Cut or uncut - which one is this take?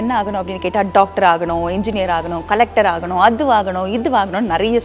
uncut